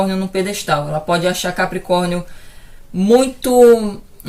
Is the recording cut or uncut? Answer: uncut